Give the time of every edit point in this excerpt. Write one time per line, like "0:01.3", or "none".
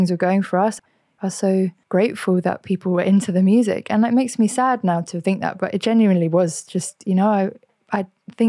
0:00.8
0:01.8